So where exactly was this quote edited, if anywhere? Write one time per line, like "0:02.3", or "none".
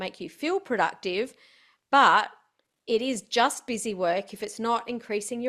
none